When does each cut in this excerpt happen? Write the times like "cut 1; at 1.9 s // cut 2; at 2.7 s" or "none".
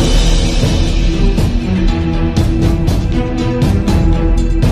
none